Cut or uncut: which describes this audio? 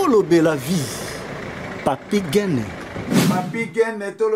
uncut